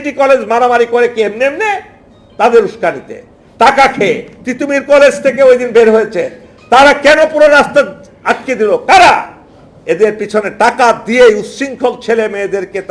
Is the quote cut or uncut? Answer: uncut